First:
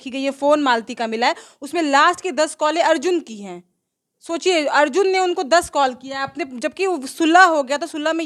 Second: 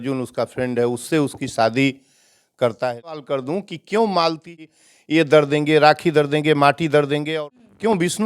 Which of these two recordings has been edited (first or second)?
second